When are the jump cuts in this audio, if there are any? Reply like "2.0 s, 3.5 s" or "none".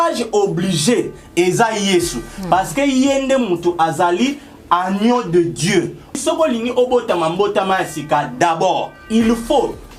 6.2 s, 9.0 s